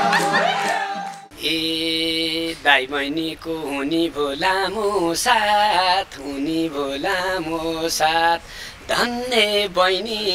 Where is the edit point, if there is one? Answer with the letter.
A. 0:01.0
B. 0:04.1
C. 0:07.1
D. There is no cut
A